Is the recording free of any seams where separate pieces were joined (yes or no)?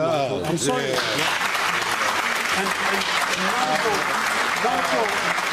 no